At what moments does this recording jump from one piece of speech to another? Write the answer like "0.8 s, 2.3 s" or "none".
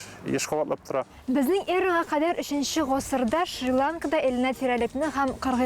1.1 s